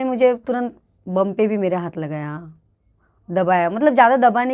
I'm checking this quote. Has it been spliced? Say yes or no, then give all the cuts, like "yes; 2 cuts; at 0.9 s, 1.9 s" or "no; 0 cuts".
no; 0 cuts